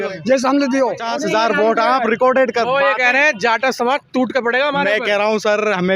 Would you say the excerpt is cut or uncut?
cut